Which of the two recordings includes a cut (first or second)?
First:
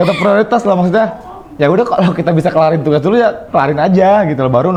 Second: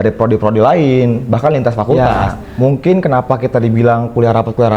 second